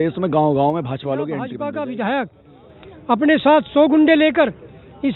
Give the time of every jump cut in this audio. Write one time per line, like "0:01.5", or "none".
0:01.5